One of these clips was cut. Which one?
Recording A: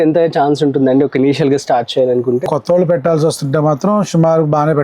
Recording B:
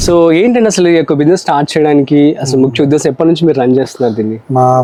A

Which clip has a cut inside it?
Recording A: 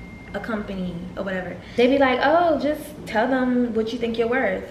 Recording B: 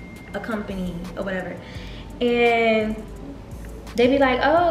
A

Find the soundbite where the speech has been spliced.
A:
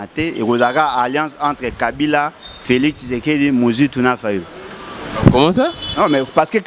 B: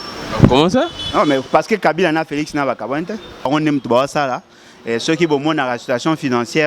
B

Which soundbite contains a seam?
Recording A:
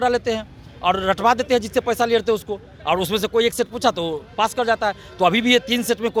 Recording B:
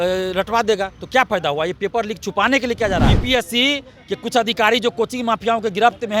B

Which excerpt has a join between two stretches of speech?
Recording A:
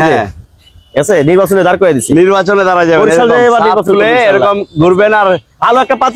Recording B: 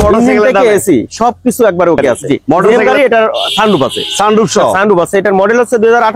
B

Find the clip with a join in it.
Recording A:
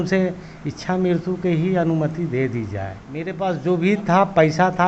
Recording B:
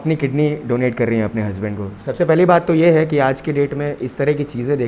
A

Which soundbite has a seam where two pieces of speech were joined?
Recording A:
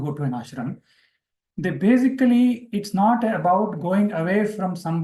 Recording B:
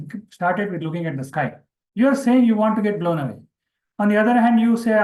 B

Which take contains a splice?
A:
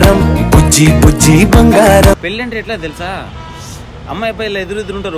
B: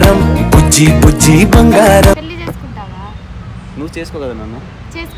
A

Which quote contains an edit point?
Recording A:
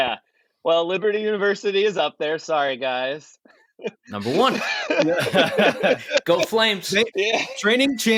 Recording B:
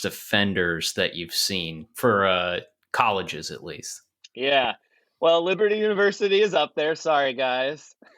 B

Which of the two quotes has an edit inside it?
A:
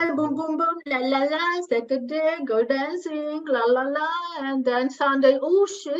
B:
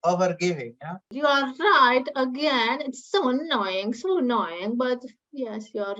B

